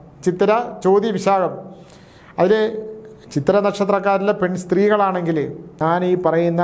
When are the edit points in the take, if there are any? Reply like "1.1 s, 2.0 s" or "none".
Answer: 5.7 s